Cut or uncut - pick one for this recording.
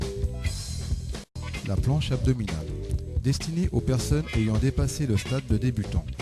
cut